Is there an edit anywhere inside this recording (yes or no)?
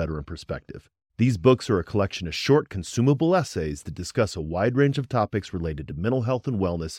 no